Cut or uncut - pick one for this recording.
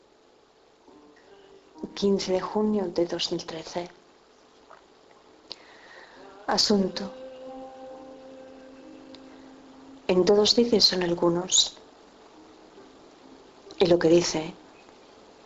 uncut